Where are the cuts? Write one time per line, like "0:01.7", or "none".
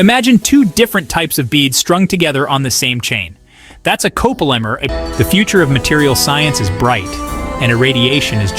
0:04.9